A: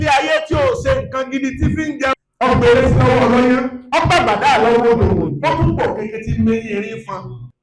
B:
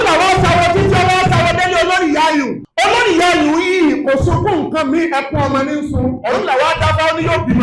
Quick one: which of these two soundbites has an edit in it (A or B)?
A